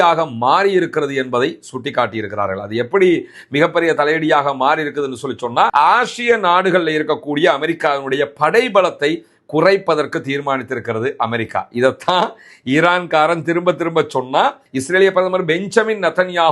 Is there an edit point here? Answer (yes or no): yes